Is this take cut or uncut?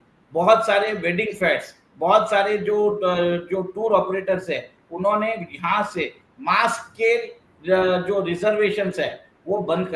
uncut